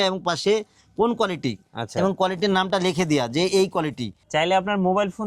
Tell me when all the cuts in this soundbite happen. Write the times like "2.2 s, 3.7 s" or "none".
4.2 s

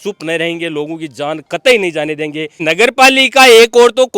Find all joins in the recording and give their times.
2.7 s

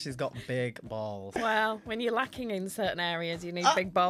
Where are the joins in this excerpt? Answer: 1.2 s

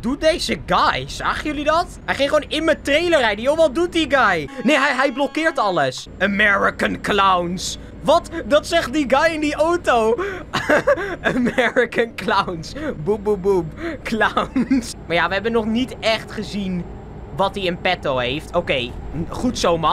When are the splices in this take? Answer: 2.0 s, 4.5 s, 6.1 s, 14.9 s

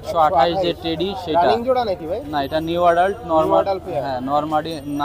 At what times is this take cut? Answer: none

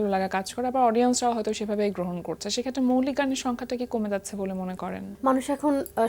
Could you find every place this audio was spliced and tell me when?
5.0 s

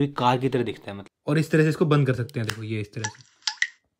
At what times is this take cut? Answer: 1.1 s

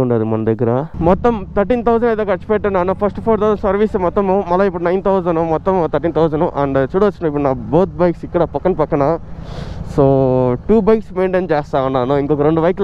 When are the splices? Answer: 0.9 s

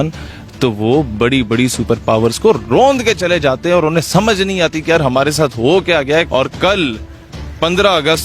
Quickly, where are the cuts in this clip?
6.3 s

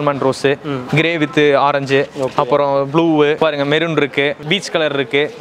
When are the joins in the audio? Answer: 3.4 s, 4.4 s

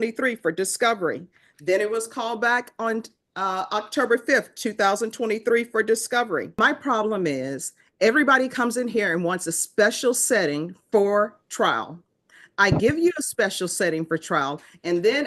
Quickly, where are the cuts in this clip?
6.5 s

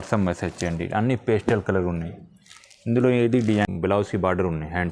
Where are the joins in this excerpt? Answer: 3.7 s

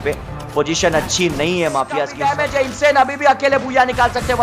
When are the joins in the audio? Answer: 2.2 s

